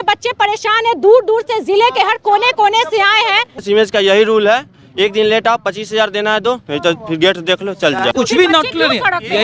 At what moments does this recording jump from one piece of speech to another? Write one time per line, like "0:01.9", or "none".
0:03.6
0:08.1